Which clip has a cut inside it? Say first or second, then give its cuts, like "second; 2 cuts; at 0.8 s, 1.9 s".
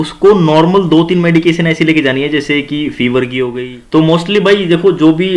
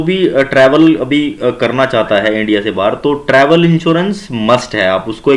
first; 1 cut; at 3.6 s